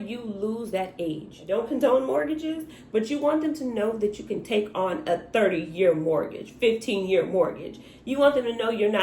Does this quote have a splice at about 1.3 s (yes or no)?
yes